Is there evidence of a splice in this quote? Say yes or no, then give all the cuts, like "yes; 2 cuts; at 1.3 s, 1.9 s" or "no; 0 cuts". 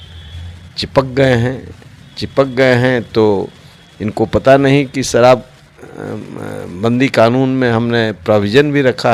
no; 0 cuts